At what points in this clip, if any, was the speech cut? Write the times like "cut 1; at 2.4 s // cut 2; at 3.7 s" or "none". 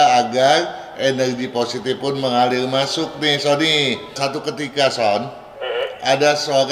cut 1; at 4.1 s

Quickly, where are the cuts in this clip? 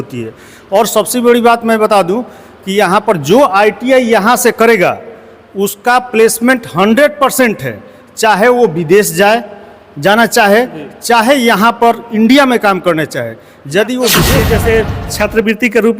cut 1; at 14.4 s

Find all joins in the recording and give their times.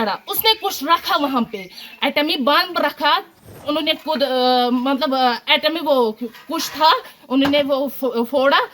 cut 1; at 3.6 s

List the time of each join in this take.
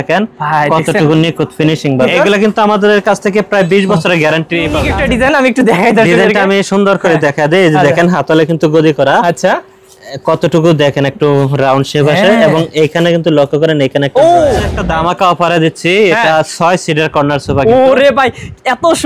cut 1; at 2.1 s // cut 2; at 4.8 s // cut 3; at 14.7 s

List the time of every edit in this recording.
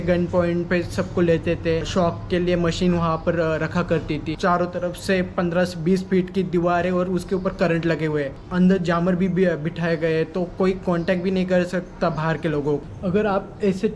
cut 1; at 1.9 s // cut 2; at 4.3 s // cut 3; at 8.4 s // cut 4; at 12.9 s

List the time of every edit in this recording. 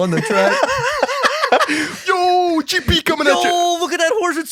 none

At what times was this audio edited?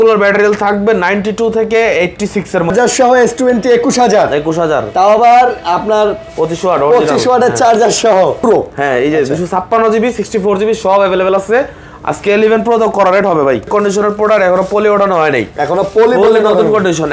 cut 1; at 2.7 s // cut 2; at 8.4 s // cut 3; at 13.7 s

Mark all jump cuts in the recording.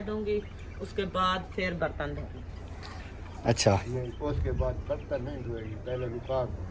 cut 1; at 4.1 s

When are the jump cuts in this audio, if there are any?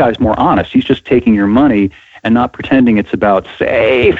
none

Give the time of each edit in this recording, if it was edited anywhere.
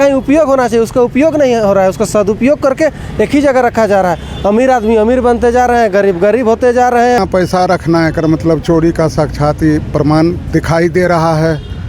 cut 1; at 7.2 s

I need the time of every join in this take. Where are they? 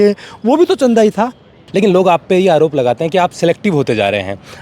cut 1; at 1.6 s

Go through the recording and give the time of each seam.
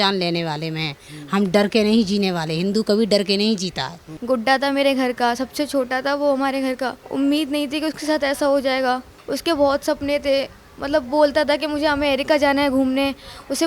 cut 1; at 4.1 s // cut 2; at 7.0 s // cut 3; at 9.1 s

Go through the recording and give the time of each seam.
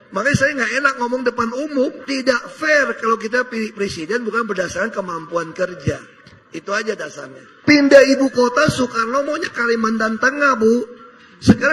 none

